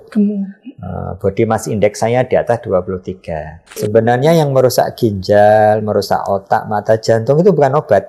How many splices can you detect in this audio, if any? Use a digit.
1